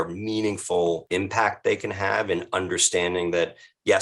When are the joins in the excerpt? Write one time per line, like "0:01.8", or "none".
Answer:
0:01.0